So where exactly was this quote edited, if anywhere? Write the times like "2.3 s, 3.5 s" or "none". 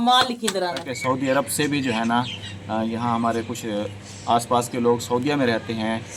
0.9 s